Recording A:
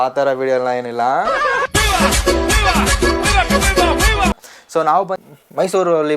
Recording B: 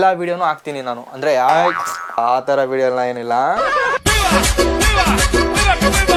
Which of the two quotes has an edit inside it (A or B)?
A